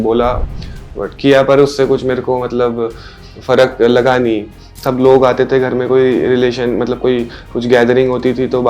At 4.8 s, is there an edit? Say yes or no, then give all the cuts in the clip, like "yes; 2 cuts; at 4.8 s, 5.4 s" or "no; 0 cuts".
yes; 1 cut; at 4.8 s